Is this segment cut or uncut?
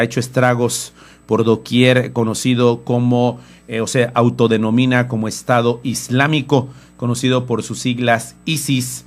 cut